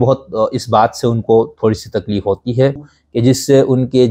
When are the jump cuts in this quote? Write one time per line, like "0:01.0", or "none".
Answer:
0:02.9